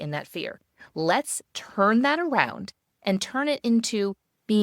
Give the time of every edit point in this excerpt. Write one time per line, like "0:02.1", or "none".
0:02.8